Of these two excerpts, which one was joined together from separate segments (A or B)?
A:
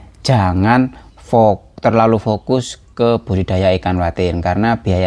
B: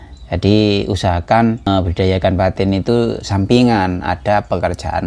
B